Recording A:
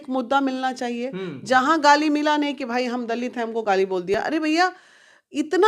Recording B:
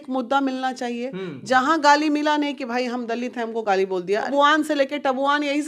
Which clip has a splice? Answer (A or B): B